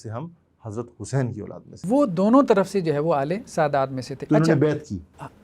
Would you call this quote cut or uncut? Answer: cut